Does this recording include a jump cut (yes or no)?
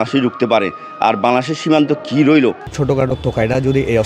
yes